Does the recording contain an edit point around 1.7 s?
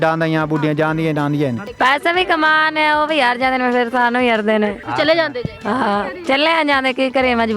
yes; 2 cuts; at 1.7 s, 4.8 s

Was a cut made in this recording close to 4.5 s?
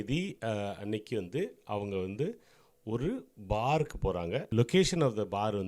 yes; 1 cut; at 4.5 s

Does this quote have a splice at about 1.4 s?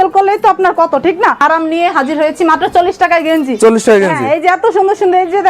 yes; 1 cut; at 1.4 s

